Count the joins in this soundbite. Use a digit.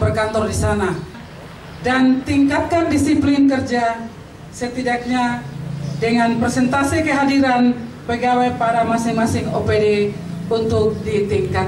1